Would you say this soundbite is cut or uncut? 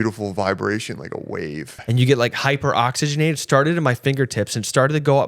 cut